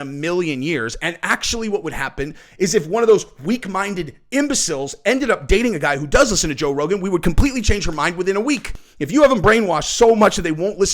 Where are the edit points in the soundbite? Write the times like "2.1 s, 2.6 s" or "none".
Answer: 8.7 s